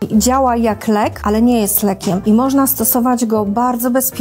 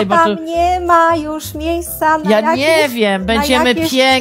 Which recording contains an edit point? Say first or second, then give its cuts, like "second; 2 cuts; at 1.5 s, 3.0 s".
first; 2 cuts; at 1.2 s, 2.2 s